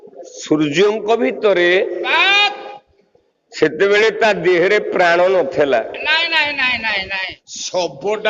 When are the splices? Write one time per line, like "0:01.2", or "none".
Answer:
0:01.4
0:07.3